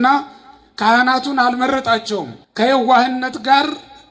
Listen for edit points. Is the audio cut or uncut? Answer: cut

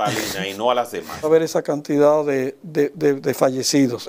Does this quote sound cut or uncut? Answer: cut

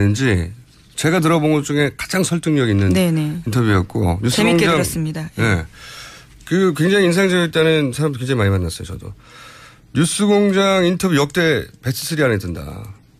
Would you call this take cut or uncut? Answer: uncut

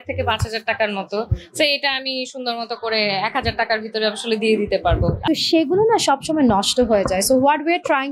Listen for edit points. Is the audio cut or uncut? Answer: cut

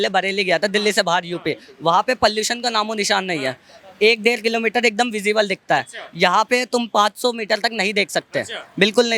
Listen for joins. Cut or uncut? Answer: uncut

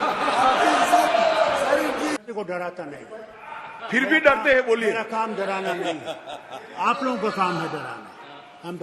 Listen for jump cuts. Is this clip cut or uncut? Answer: cut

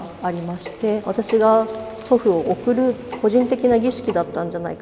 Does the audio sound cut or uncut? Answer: cut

